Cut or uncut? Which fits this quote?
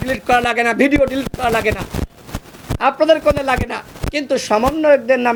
uncut